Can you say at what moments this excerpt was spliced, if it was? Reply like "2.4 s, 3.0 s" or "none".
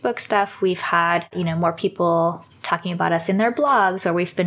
1.4 s